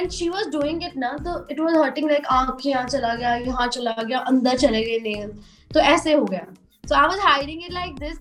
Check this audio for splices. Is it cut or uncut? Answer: uncut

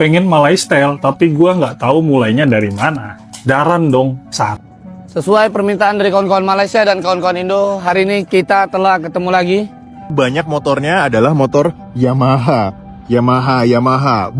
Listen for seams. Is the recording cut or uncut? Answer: cut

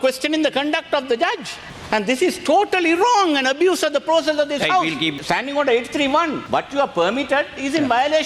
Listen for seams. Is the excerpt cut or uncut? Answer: cut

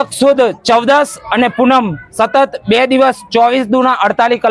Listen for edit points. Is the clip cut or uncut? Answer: uncut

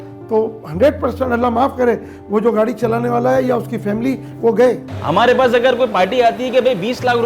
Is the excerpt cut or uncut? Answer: cut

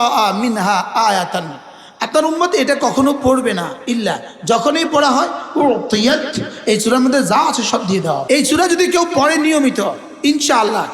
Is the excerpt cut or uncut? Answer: cut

